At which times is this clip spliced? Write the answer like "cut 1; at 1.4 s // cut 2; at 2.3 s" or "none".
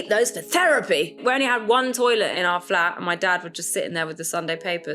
cut 1; at 1.2 s // cut 2; at 2.3 s